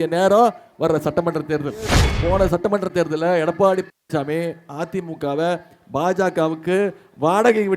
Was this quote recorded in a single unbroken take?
no; 1 cut; at 2.1 s

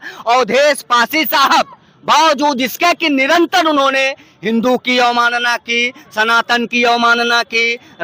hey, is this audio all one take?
yes; 0 cuts

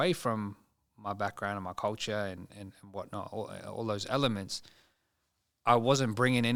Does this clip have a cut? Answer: no; 0 cuts

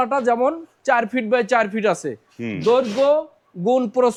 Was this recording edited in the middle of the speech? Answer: no; 0 cuts

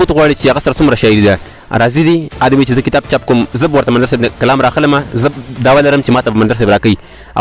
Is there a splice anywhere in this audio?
no; 0 cuts

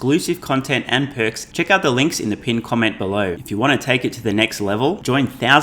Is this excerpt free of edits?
no; 2 cuts; at 1.4 s, 3.4 s

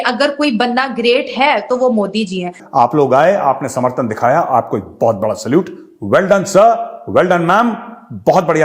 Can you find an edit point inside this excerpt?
yes; 1 cut; at 2.6 s

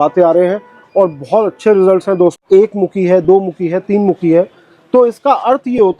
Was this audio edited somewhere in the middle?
yes; 1 cut; at 2.4 s

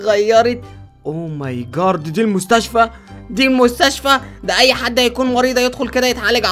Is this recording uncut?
yes; 0 cuts

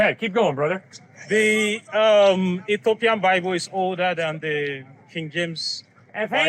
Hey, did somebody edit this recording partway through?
no; 0 cuts

